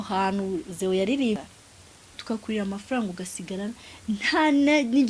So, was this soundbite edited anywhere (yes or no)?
yes